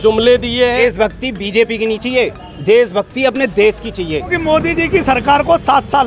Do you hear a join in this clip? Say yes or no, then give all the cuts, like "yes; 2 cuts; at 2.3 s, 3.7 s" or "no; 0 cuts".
yes; 2 cuts; at 0.8 s, 4.3 s